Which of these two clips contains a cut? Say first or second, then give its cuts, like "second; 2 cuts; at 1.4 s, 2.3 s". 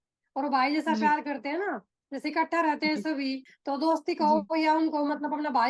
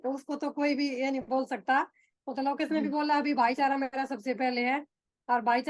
first; 1 cut; at 3.5 s